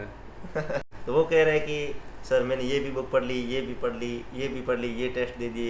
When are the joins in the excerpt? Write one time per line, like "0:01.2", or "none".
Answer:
0:00.9